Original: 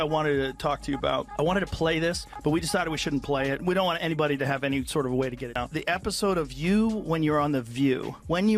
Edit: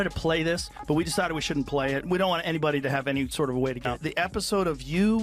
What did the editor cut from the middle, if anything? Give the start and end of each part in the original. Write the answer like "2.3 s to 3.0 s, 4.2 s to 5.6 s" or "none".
5.4 s to 5.6 s